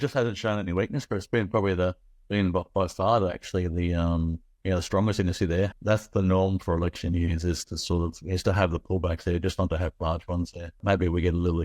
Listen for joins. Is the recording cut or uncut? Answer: cut